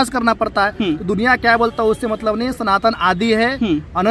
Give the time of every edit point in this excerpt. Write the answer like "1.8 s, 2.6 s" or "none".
none